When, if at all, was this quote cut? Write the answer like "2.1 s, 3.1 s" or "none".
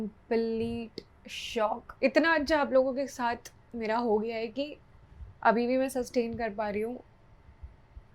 1.9 s